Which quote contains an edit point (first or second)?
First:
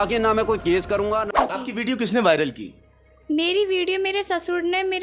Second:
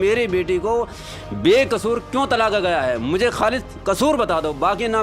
first